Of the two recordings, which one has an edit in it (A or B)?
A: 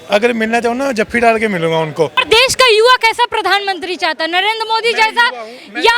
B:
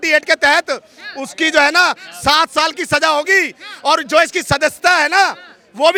A